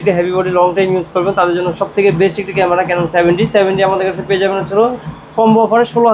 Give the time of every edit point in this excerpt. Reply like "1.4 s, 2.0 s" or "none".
none